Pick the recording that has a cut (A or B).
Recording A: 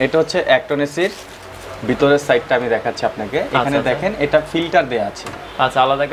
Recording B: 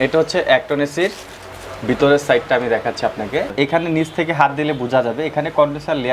B